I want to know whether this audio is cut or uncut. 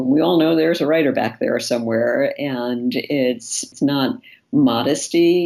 cut